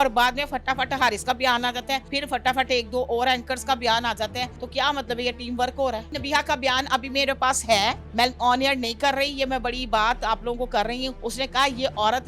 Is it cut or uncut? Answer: cut